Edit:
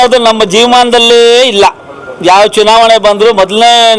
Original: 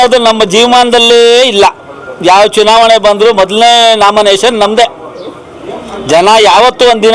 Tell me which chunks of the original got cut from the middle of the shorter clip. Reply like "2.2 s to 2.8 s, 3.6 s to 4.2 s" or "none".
none

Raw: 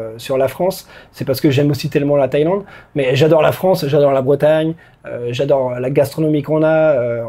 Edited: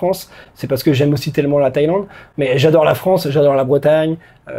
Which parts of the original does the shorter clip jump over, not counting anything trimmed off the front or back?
none

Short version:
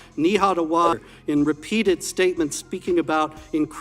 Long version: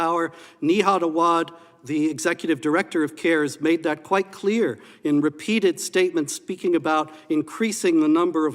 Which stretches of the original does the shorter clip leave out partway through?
1.5 s to 4.9 s

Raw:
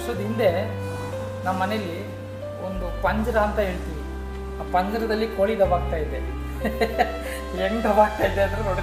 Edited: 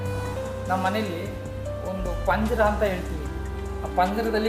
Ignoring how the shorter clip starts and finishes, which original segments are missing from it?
none

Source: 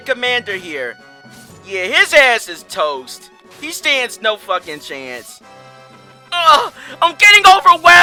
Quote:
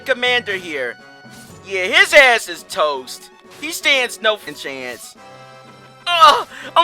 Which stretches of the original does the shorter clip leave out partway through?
4.5 s to 4.7 s

